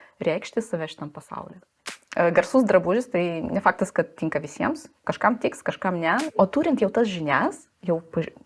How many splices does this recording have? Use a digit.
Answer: 2